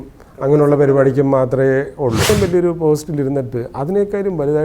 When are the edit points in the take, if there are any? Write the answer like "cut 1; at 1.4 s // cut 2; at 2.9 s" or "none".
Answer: cut 1; at 2.3 s